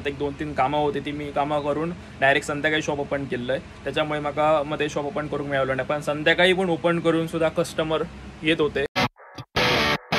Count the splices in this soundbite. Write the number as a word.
one